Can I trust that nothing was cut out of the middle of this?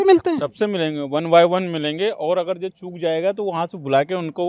yes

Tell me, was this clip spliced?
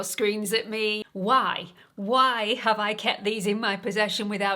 yes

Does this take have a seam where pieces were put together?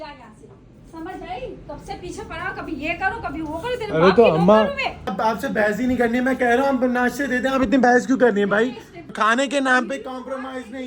yes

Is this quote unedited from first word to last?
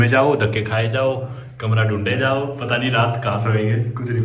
yes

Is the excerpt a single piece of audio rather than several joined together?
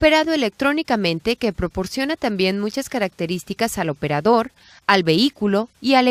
yes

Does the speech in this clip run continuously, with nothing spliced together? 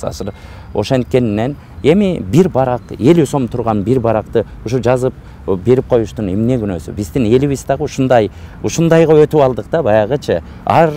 yes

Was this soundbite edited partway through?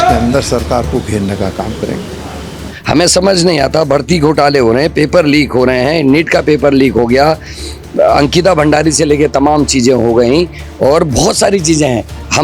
yes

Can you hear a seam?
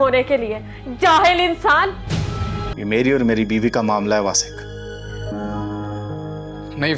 yes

